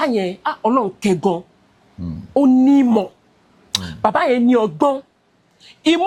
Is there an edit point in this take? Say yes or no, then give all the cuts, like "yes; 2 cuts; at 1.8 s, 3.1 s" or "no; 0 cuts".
no; 0 cuts